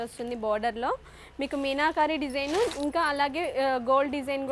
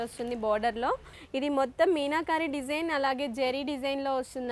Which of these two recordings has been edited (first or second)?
second